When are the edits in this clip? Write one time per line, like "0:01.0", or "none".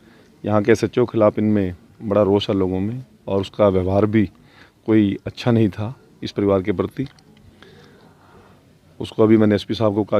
none

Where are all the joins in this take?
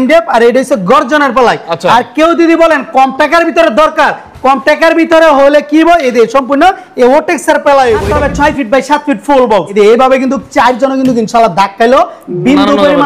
0:08.1
0:09.7

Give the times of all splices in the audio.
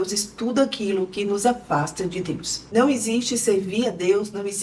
0:02.6

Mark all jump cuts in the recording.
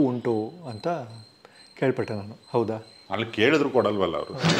0:02.9

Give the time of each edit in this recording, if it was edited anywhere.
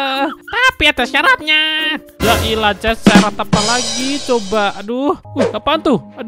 0:05.3

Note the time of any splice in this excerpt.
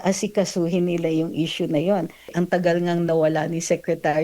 0:02.3

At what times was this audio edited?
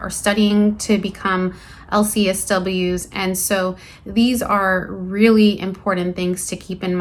none

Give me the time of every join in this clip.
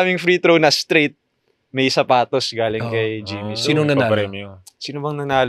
none

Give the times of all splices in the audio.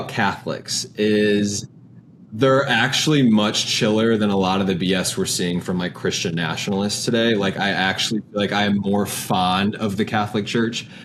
none

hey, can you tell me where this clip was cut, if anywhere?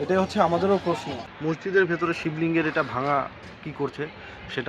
0:01.2

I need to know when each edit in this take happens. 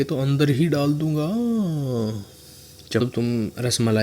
0:03.0

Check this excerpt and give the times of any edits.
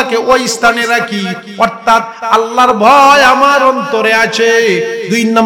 none

